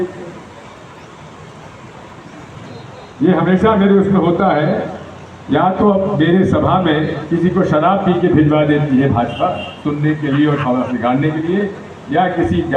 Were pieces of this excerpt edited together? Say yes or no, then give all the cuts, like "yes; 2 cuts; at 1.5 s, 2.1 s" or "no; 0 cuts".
yes; 1 cut; at 2.6 s